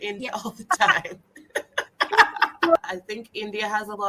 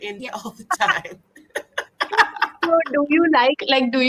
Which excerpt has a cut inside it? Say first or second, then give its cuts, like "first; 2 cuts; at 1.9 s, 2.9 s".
first; 1 cut; at 2.8 s